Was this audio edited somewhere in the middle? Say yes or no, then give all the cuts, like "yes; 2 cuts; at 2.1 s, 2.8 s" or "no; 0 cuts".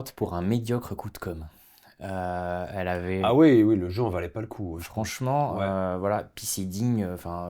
no; 0 cuts